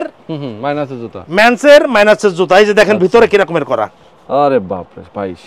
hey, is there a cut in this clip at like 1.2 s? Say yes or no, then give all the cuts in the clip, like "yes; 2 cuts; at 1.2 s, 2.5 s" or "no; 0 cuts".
no; 0 cuts